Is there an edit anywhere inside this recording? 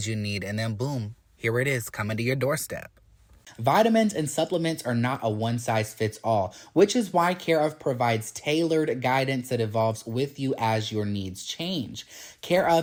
no; 0 cuts

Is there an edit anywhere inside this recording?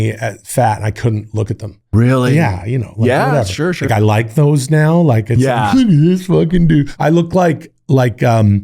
yes; 2 cuts; at 3.9 s, 6.9 s

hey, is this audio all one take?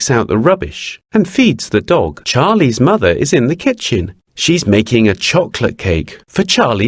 no; 1 cut; at 2.2 s

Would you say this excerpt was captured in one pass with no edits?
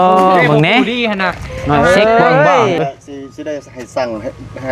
no; 1 cut; at 2.8 s

